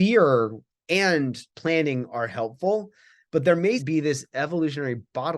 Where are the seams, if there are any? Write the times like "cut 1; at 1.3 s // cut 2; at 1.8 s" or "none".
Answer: cut 1; at 3.8 s